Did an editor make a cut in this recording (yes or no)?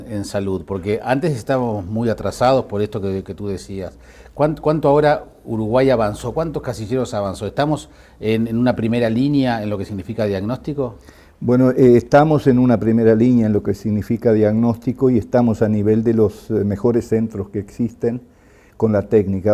yes